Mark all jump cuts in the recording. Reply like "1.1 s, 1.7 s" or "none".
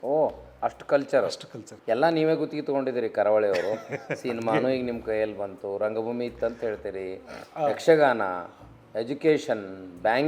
1.7 s